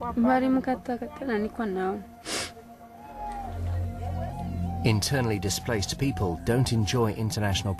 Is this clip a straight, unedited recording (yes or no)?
no